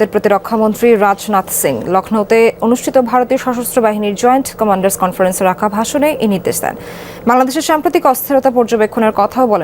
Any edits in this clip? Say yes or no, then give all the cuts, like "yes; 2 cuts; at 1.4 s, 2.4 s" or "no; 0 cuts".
no; 0 cuts